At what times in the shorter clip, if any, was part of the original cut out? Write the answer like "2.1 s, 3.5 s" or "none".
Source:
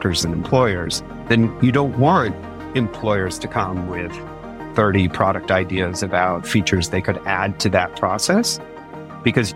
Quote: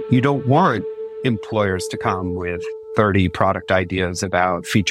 2.7 s